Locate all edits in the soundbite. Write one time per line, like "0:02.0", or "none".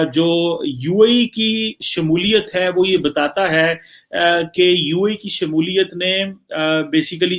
none